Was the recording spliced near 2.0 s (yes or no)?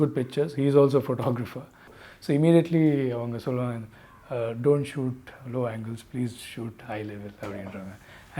yes